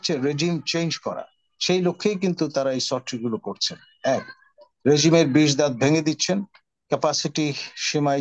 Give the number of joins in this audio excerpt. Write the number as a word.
zero